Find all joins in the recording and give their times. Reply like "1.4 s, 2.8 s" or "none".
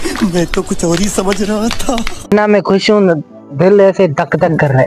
2.3 s